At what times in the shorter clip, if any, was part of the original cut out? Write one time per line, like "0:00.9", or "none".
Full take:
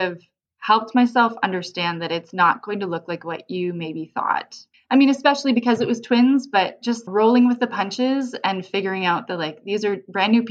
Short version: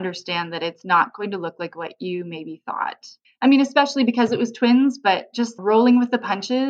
none